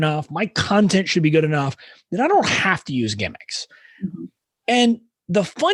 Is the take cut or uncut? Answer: uncut